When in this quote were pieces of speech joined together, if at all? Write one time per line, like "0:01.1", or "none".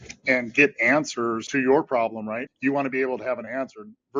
0:01.5
0:02.5